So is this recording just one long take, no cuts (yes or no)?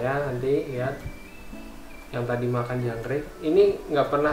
yes